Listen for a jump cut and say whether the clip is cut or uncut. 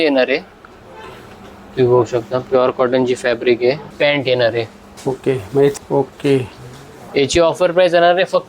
cut